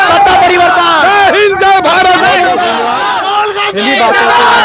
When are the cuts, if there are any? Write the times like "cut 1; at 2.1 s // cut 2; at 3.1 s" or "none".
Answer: cut 1; at 3.0 s